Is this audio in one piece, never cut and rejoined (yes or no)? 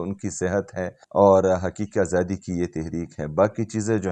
no